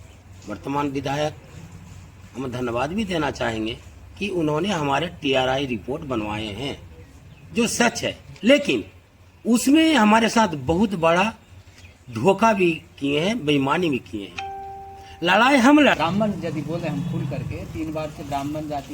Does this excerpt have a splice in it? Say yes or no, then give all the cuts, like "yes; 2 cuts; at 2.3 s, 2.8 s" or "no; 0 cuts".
yes; 1 cut; at 16.0 s